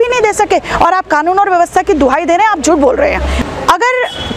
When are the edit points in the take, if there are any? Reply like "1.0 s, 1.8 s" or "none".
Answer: 3.4 s

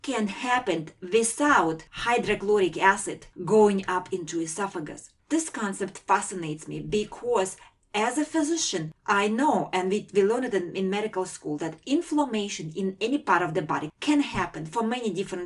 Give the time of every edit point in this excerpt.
13.9 s

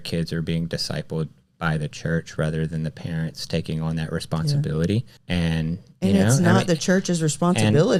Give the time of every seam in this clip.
none

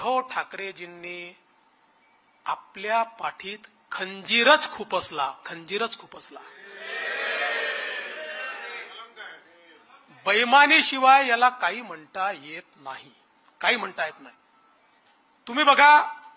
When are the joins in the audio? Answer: none

